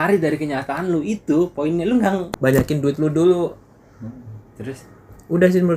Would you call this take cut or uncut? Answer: cut